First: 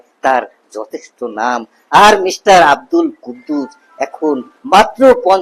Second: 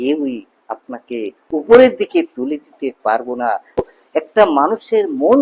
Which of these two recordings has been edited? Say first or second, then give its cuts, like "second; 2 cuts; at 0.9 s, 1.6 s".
second; 1 cut; at 3.8 s